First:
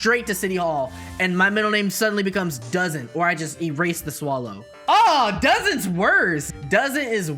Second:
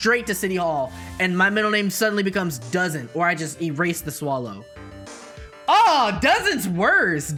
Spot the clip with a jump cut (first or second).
first